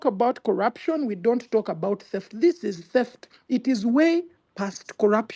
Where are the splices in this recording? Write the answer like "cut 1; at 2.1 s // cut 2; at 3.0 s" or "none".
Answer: none